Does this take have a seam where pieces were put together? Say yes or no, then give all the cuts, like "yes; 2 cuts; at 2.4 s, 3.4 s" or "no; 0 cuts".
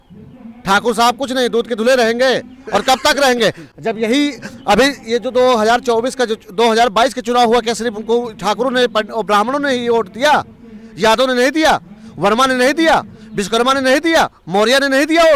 no; 0 cuts